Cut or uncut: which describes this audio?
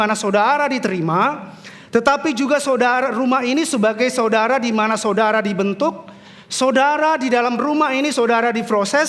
uncut